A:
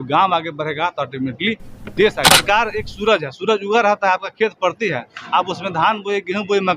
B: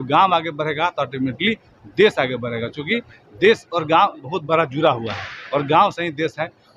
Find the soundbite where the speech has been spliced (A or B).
A